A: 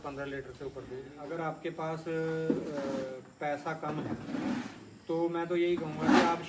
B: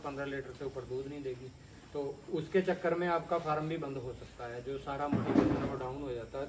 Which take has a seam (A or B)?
A